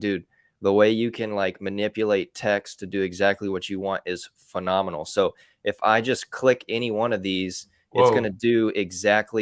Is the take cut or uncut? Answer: uncut